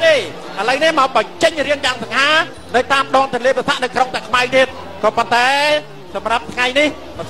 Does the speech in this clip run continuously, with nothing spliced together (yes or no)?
yes